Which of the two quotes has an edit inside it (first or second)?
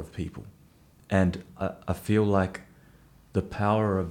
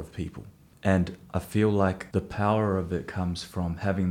second